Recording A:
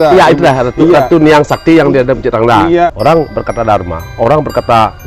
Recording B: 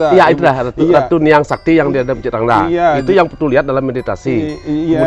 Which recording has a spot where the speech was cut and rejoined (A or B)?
A